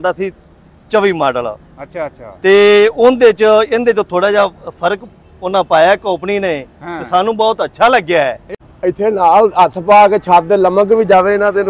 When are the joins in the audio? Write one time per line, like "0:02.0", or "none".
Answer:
0:08.5